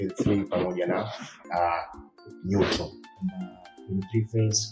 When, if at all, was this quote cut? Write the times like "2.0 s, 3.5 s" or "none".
3.5 s

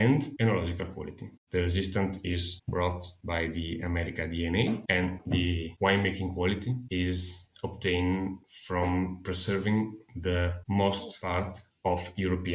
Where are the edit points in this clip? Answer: 11.1 s

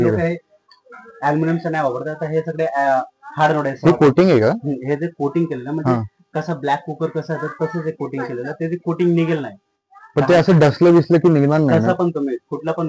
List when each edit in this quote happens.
none

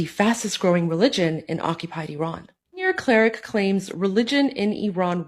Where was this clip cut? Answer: 2.8 s

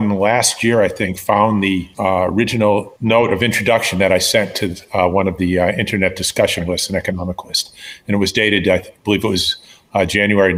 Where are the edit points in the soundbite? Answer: 1.9 s, 2.9 s

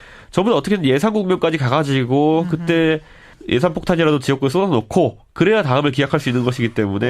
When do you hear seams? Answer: none

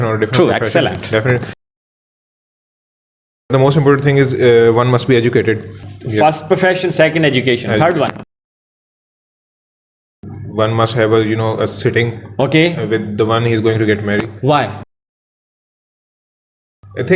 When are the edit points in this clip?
none

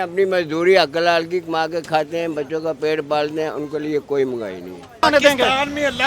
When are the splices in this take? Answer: 5.0 s

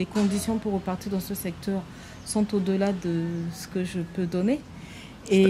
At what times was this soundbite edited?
none

